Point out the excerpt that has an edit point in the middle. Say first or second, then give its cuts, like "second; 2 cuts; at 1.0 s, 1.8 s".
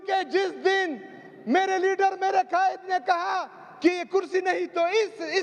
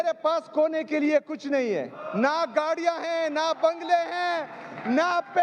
second; 1 cut; at 2.0 s